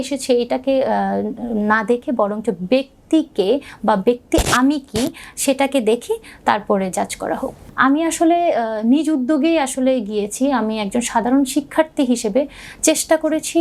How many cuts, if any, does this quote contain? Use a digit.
1